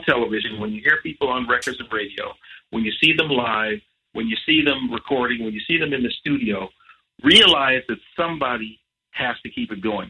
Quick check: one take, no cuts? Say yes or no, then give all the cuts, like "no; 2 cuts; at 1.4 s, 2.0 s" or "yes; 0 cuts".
yes; 0 cuts